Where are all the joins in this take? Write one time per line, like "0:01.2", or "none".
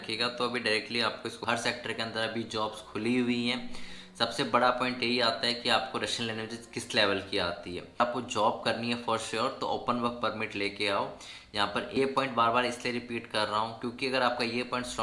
0:01.4
0:08.0
0:12.0